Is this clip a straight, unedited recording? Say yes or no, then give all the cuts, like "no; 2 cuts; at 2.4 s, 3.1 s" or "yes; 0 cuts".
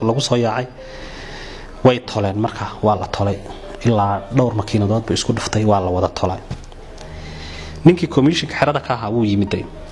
yes; 0 cuts